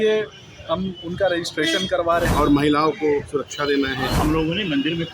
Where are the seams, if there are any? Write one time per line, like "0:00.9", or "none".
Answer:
0:02.3
0:04.1